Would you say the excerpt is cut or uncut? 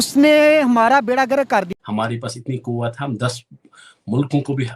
cut